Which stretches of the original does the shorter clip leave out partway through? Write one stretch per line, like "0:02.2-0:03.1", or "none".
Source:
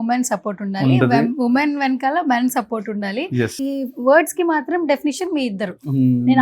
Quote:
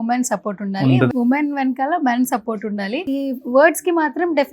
0:01.1-0:01.3
0:03.3-0:03.5